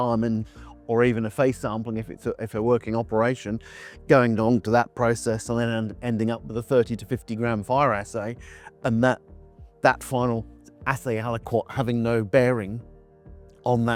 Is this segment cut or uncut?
uncut